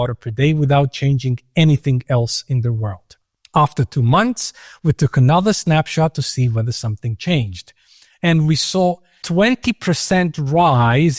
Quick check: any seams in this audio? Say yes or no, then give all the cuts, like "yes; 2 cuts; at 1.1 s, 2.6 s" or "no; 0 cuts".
no; 0 cuts